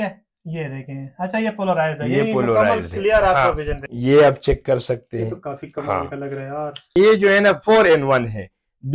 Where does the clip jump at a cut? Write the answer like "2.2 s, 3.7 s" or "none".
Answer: 3.8 s, 6.9 s